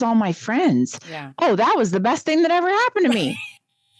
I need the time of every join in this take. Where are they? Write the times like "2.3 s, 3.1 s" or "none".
none

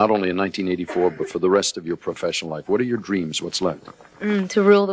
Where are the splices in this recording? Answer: none

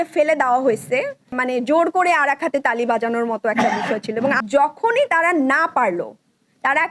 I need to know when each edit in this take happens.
1.4 s, 4.4 s

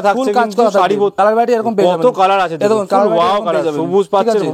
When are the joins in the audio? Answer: 1.1 s

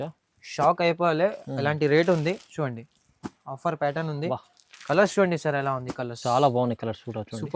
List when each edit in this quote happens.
none

